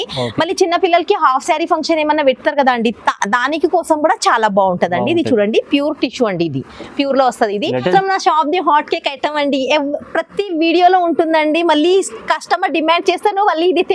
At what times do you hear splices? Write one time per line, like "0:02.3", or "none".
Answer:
0:07.9